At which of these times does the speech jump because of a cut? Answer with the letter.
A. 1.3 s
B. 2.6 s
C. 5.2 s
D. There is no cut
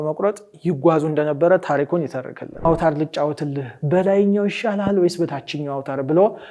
B